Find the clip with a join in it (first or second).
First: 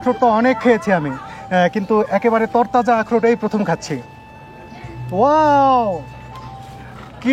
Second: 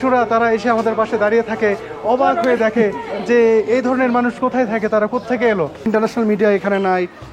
second